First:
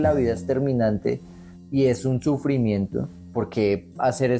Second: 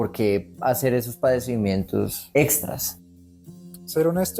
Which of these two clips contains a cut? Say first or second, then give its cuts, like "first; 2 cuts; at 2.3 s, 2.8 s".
second; 2 cuts; at 2.2 s, 3.2 s